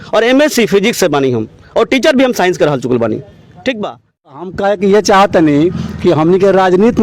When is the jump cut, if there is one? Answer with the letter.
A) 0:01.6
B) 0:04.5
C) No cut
B